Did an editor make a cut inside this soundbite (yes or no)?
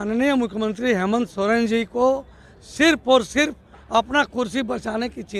no